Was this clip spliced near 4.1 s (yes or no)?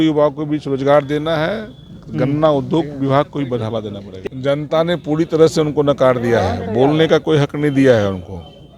yes